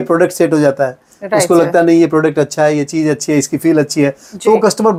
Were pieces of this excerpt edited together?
no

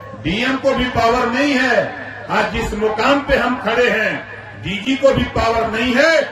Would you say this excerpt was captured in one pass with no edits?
yes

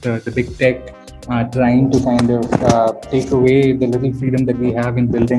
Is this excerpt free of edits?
yes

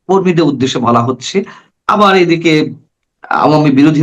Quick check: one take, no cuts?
yes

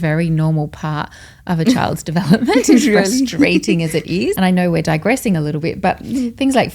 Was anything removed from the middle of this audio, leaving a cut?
yes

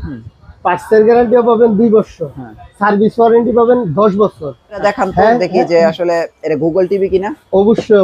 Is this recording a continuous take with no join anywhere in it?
no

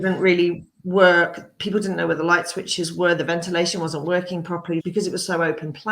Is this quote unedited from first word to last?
no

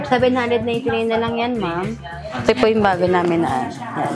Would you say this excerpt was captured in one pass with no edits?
no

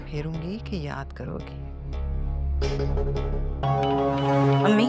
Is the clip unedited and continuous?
no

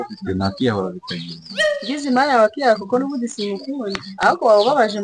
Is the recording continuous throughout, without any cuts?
yes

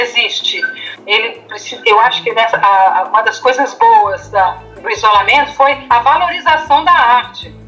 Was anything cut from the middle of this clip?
yes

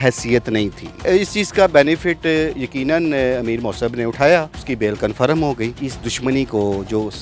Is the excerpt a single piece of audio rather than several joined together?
no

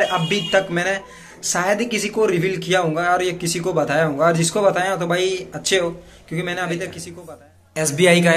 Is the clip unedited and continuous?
no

